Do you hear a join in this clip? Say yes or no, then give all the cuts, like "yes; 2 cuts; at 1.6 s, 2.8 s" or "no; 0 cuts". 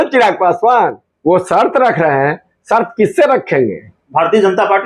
yes; 1 cut; at 1.1 s